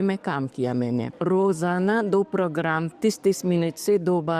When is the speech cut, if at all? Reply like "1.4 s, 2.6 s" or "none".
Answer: 1.1 s